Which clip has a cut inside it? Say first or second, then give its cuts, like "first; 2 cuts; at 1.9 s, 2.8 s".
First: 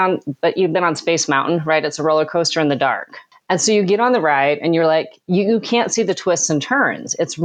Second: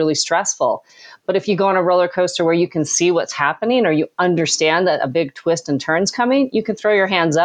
first; 1 cut; at 3.5 s